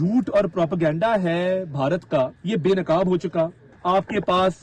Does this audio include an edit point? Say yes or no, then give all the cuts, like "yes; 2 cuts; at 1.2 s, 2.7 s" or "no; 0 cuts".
yes; 2 cuts; at 2.4 s, 3.7 s